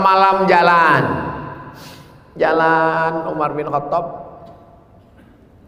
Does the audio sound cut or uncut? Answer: uncut